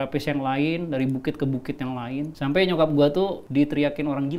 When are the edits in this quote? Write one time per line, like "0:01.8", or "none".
0:02.3
0:03.4